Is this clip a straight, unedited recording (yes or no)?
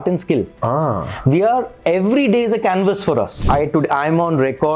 no